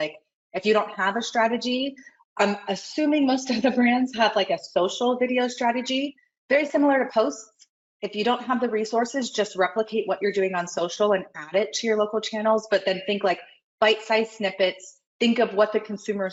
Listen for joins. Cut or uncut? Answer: uncut